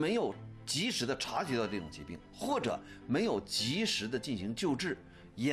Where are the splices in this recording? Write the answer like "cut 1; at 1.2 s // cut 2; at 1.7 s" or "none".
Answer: none